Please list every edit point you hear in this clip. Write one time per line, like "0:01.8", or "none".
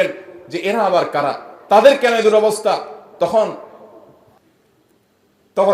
0:04.4

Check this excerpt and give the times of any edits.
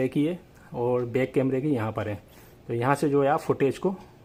none

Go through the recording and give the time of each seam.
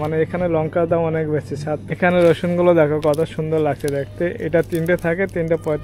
0:01.8

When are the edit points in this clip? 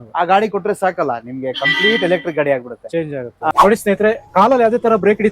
0:03.5

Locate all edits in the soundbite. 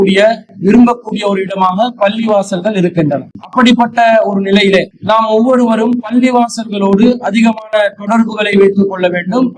0:03.4
0:04.9

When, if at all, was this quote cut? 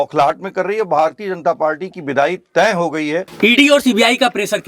0:03.3

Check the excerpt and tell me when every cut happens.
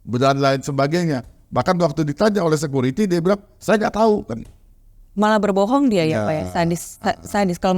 none

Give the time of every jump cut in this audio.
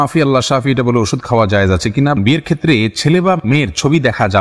0:02.2

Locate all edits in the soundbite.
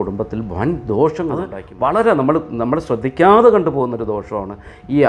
0:01.6

